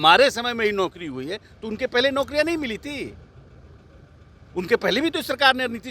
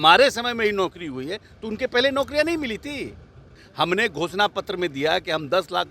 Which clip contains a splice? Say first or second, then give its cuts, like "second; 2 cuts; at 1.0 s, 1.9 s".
second; 1 cut; at 3.6 s